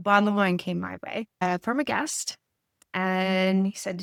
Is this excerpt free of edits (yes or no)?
yes